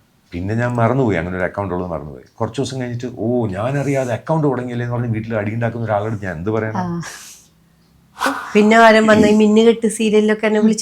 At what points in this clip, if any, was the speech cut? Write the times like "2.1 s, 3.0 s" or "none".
8.3 s